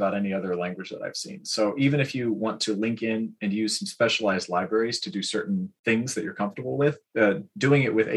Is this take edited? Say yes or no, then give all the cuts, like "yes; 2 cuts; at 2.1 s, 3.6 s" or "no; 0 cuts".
yes; 2 cuts; at 5.7 s, 7.0 s